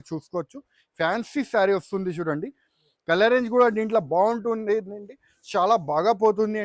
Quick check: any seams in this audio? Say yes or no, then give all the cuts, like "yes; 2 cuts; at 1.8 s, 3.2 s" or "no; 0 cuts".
no; 0 cuts